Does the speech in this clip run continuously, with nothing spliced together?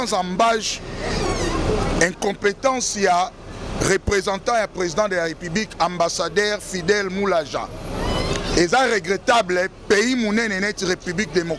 yes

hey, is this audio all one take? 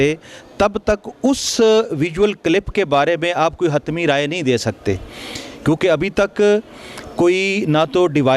yes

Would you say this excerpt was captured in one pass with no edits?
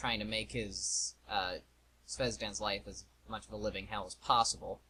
yes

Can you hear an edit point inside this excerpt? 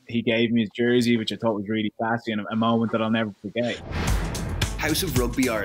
yes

